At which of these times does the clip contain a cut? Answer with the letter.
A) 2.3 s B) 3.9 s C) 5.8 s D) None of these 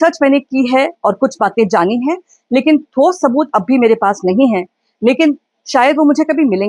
D